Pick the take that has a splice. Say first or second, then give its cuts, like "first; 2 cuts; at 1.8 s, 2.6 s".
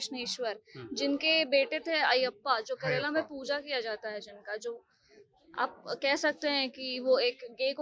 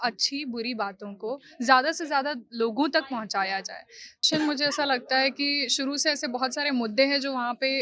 second; 1 cut; at 4.2 s